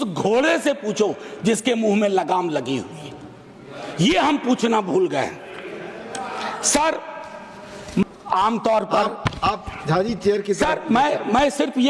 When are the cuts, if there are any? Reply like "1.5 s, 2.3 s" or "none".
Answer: none